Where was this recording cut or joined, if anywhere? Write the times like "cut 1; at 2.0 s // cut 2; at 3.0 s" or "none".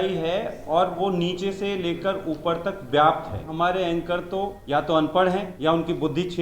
cut 1; at 3.5 s // cut 2; at 4.6 s // cut 3; at 5.5 s